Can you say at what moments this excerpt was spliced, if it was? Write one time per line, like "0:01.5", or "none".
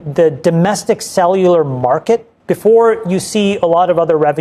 0:02.4